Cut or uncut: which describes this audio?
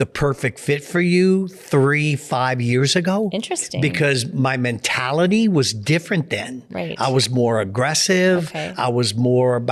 uncut